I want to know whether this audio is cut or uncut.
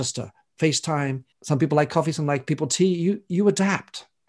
cut